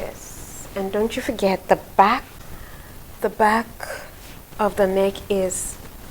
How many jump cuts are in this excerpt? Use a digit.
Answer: 1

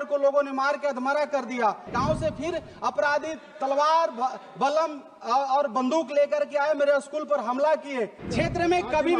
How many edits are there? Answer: 2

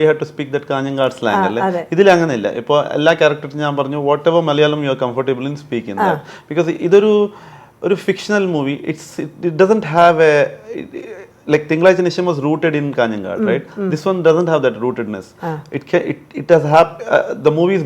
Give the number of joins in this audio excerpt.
0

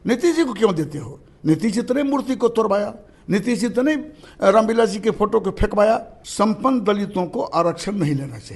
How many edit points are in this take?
1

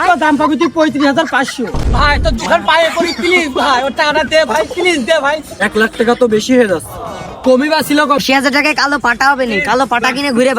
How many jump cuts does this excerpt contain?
3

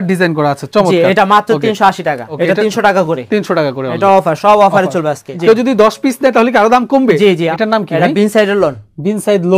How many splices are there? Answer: 3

